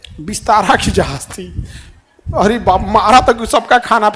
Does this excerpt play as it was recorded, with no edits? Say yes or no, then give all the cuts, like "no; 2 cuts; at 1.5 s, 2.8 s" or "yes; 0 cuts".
yes; 0 cuts